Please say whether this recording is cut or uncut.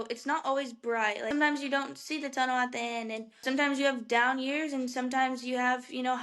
cut